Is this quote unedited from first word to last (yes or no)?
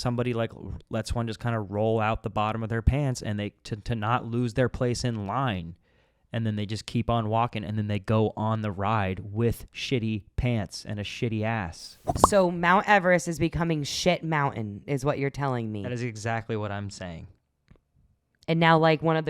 no